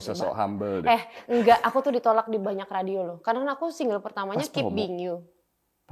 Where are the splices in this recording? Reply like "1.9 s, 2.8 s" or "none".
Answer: none